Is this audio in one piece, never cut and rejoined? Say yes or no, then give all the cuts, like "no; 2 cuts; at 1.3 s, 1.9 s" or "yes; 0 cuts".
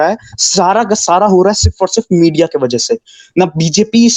yes; 0 cuts